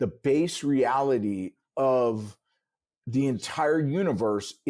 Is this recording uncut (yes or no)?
yes